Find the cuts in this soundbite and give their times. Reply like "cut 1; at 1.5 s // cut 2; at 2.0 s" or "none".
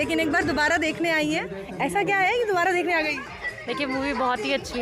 none